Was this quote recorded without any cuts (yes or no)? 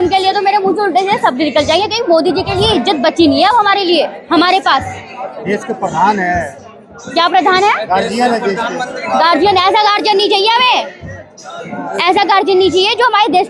yes